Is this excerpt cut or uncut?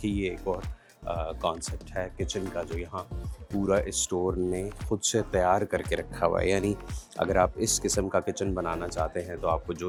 uncut